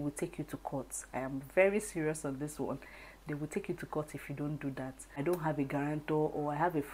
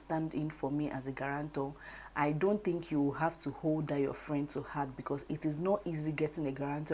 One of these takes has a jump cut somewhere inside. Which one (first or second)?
first